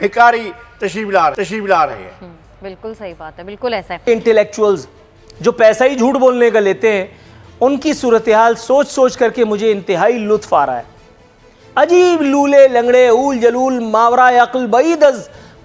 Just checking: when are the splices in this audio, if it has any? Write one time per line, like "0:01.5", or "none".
none